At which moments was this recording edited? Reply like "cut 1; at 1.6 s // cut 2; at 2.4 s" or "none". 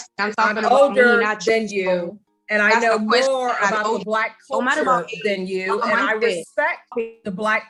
none